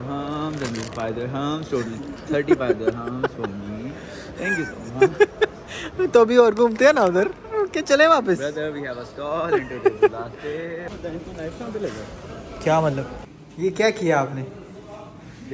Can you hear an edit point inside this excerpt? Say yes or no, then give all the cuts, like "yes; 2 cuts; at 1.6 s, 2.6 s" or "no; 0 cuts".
yes; 1 cut; at 10.9 s